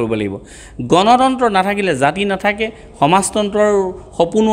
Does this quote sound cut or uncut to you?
uncut